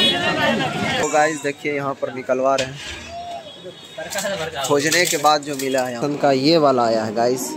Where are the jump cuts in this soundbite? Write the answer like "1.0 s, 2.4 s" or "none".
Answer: 1.0 s, 6.0 s